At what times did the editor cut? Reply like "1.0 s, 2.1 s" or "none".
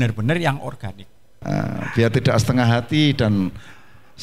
1.4 s